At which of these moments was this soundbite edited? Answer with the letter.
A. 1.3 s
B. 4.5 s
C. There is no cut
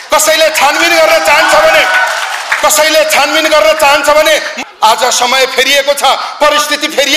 B